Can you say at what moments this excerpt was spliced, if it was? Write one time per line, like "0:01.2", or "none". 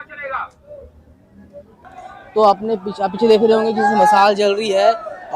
0:02.0

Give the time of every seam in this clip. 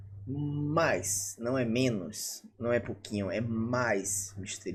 none

